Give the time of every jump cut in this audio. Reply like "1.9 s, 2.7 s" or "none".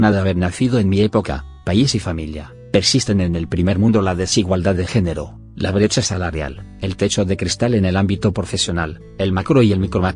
3.3 s